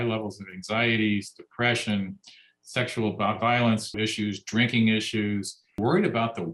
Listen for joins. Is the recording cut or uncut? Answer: cut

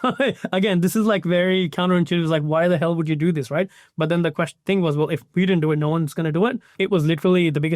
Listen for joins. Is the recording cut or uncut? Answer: cut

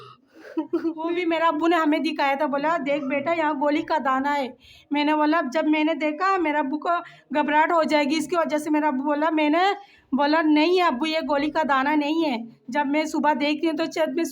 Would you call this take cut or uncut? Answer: cut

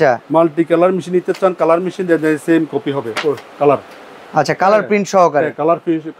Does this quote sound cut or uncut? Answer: uncut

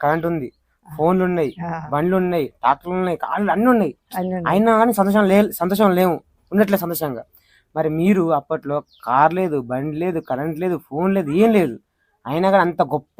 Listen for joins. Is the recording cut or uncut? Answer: uncut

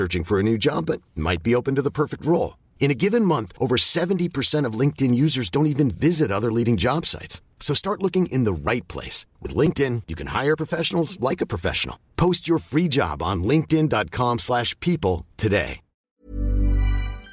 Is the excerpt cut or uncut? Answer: cut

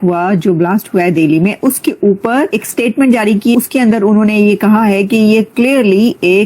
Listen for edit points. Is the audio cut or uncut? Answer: cut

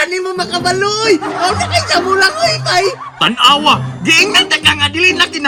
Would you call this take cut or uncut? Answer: uncut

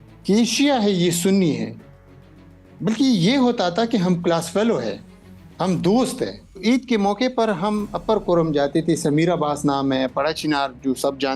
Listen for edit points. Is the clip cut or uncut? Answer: cut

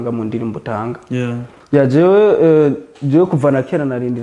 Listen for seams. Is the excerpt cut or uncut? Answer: cut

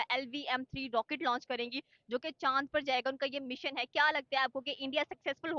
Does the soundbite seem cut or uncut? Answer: uncut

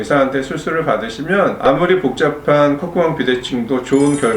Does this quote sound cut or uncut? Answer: cut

